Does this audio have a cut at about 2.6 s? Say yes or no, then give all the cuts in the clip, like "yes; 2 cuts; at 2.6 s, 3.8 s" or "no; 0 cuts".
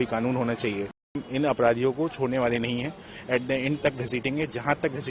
no; 1 cut; at 1.2 s